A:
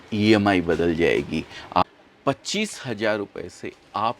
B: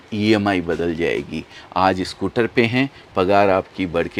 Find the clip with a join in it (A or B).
A